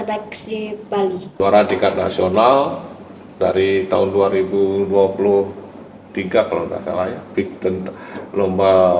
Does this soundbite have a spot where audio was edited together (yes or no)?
yes